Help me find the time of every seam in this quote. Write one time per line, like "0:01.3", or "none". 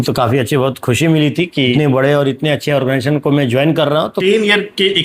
0:01.7
0:04.1